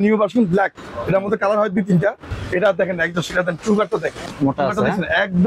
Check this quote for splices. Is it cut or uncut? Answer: cut